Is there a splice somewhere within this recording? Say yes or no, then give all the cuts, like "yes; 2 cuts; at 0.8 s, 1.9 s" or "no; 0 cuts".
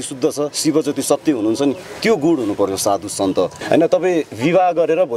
yes; 1 cut; at 3.6 s